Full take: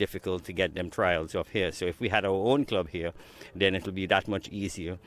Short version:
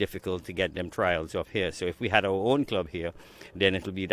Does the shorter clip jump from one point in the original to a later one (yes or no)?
no